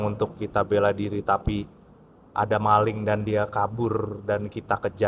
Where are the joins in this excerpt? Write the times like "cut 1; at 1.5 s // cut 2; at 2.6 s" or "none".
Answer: none